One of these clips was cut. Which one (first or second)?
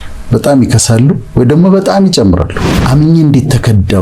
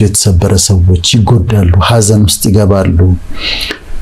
first